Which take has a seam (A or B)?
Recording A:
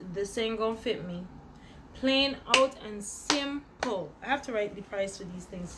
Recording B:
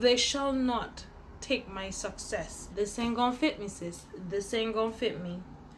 B